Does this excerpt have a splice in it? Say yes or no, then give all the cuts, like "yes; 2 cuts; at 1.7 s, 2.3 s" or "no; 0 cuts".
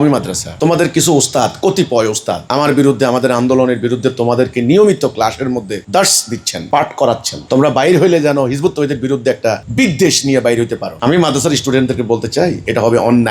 no; 0 cuts